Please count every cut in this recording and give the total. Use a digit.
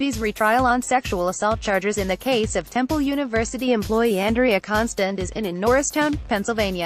2